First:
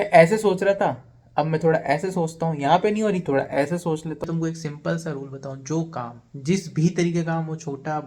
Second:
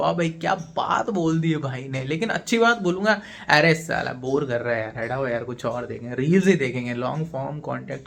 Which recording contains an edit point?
first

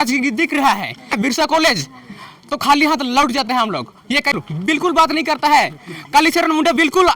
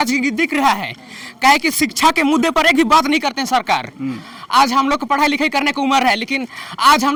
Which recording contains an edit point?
first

